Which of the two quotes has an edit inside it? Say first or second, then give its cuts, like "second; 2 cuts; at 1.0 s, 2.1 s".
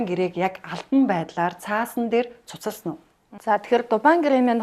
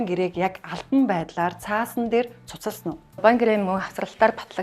second; 1 cut; at 3.1 s